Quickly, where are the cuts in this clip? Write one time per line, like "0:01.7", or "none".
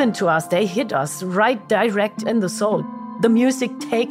0:03.0